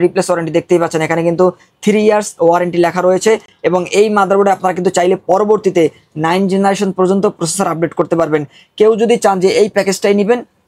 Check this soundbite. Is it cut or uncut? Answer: uncut